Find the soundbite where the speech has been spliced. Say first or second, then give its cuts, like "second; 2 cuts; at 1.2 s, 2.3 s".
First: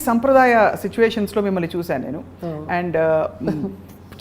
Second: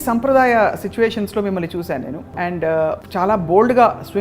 second; 2 cuts; at 2.2 s, 3.0 s